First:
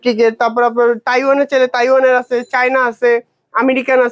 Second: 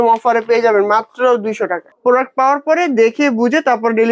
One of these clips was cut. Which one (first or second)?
second